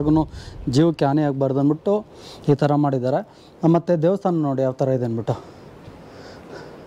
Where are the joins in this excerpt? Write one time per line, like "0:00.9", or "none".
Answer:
none